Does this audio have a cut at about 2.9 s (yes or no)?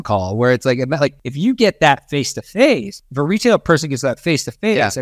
no